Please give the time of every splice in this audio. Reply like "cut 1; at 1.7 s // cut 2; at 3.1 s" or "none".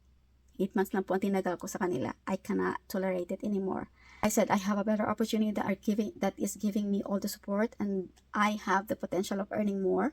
cut 1; at 4.1 s